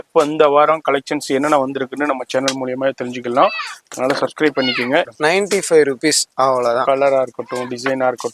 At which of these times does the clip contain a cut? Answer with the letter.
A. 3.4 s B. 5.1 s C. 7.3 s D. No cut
B